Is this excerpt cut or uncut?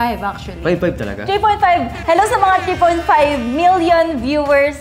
uncut